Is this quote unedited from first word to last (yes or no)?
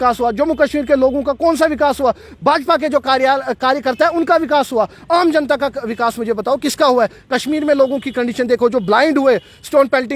yes